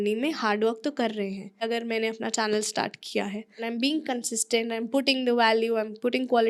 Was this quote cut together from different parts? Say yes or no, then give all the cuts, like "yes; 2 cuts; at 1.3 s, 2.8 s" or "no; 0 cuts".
yes; 2 cuts; at 1.7 s, 3.6 s